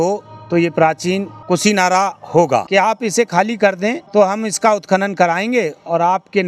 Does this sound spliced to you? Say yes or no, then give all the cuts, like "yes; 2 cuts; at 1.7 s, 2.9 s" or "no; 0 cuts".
yes; 3 cuts; at 1.3 s, 2.7 s, 4.0 s